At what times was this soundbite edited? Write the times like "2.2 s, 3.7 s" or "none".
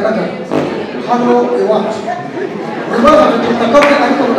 none